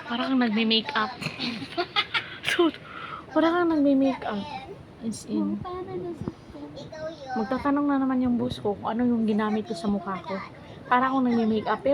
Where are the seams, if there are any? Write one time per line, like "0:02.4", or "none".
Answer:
none